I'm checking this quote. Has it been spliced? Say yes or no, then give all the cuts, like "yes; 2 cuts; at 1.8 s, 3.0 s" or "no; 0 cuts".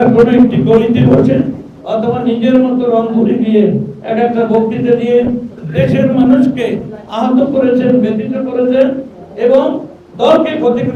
no; 0 cuts